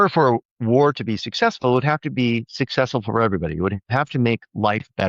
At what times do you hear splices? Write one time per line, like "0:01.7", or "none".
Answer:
none